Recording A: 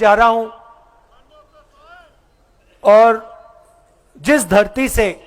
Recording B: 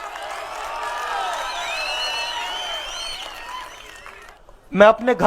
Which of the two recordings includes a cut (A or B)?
B